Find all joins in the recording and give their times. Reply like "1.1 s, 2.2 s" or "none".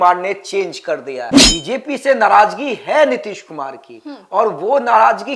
1.4 s